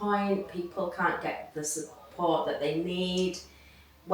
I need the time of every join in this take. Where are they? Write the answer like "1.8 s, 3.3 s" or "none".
none